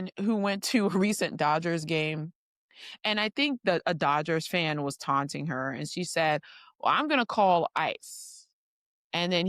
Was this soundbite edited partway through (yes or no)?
no